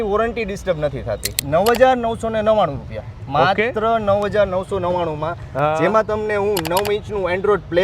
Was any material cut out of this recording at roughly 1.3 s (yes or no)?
yes